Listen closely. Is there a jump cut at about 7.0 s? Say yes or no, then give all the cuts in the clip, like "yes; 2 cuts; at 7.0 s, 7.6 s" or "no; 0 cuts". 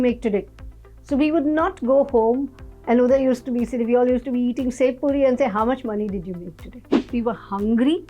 yes; 1 cut; at 7.0 s